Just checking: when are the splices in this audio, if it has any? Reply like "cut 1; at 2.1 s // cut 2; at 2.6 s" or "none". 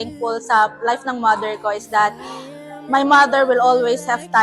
none